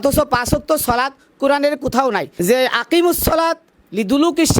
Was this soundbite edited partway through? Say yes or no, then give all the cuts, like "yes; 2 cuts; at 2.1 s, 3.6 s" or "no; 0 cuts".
yes; 1 cut; at 2.3 s